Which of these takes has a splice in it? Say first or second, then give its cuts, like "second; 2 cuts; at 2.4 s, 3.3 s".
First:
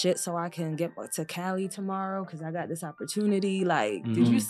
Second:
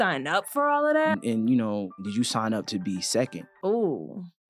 second; 3 cuts; at 1.2 s, 2.0 s, 3.4 s